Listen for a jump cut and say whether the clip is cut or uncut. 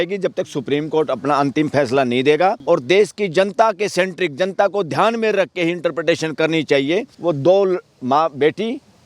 cut